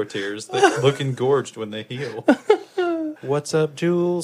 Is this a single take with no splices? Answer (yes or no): no